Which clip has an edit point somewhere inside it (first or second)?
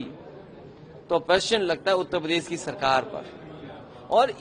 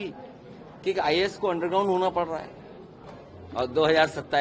second